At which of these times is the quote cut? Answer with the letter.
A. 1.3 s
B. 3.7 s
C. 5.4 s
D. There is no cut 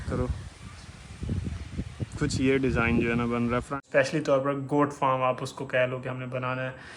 B